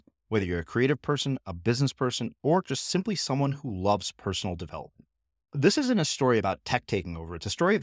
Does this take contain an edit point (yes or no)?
no